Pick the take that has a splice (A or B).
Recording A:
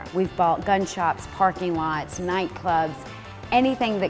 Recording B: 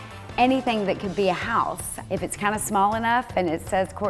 B